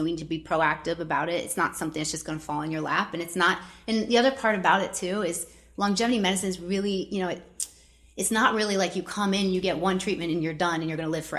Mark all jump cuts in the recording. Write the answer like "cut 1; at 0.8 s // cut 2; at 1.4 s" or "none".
none